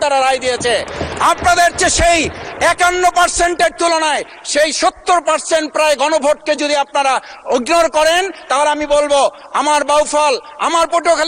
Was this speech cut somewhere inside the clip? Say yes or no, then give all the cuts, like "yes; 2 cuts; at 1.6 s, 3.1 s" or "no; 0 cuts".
no; 0 cuts